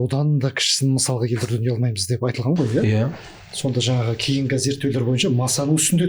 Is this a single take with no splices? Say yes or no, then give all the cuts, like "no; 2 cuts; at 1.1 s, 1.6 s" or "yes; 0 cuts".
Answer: yes; 0 cuts